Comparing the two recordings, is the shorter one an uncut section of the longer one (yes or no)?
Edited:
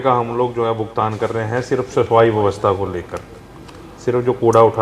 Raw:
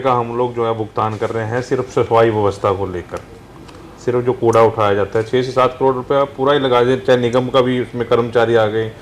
yes